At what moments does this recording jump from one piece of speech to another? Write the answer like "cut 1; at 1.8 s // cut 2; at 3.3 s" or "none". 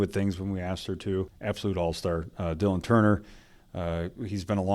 cut 1; at 1.3 s